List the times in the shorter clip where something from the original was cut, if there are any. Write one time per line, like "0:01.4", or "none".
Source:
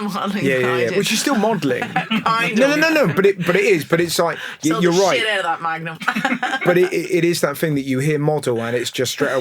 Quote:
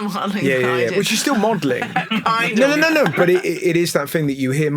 0:03.1